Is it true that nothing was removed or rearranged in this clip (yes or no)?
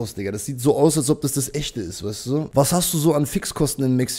no